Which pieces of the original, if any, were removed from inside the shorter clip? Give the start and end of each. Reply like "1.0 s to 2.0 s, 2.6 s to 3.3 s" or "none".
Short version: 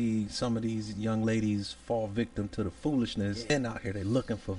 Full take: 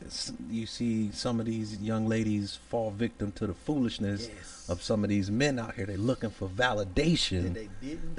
4.3 s to 5.4 s

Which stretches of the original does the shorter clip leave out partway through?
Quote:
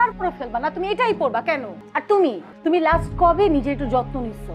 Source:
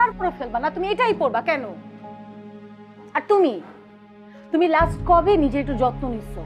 1.8 s to 3.0 s, 3.7 s to 4.4 s

